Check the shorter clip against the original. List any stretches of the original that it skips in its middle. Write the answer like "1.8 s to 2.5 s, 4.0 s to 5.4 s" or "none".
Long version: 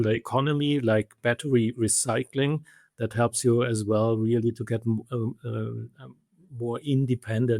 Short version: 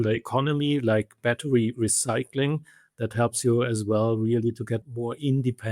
4.8 s to 6.5 s